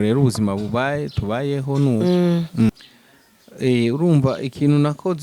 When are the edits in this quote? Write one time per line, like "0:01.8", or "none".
0:02.7